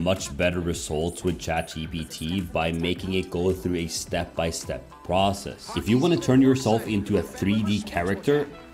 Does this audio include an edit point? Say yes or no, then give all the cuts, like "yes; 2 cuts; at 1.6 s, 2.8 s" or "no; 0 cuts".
yes; 2 cuts; at 2.3 s, 5.7 s